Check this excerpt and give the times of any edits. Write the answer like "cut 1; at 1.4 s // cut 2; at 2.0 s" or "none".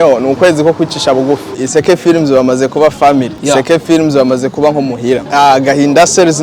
cut 1; at 1.6 s // cut 2; at 3.3 s // cut 3; at 5.2 s